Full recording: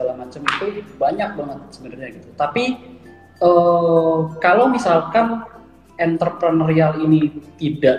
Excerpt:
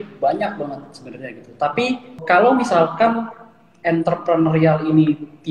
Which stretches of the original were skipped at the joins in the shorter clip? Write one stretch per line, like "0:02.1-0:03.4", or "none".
0:02.9-0:04.3